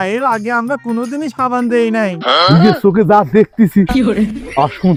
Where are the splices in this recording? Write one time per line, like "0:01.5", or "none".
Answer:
none